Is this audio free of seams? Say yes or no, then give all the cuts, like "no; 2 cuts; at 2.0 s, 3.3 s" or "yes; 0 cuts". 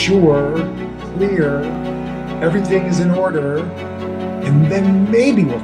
yes; 0 cuts